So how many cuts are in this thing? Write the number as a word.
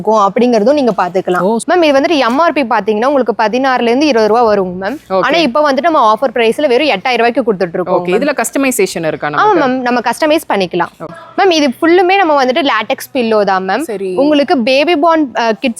two